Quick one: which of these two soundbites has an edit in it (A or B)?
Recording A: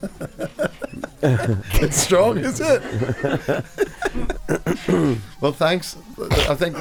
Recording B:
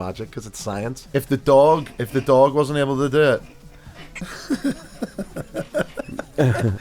B